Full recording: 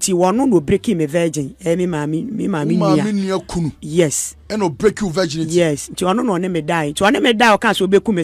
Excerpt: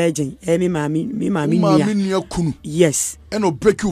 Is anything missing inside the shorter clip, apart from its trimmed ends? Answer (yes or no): no